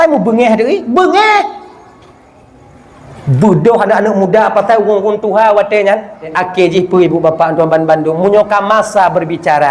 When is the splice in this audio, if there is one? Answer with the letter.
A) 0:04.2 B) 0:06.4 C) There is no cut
B